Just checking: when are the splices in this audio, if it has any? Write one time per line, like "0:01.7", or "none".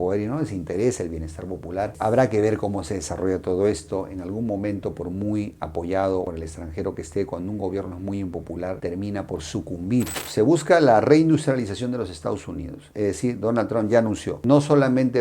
0:10.2